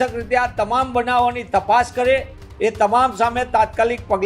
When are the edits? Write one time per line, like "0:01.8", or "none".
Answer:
0:02.4